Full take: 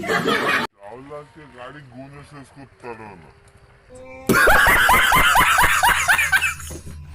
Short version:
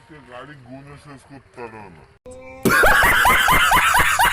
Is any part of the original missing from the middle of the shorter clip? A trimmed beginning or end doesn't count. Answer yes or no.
yes